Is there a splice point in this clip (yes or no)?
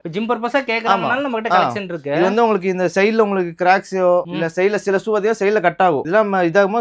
no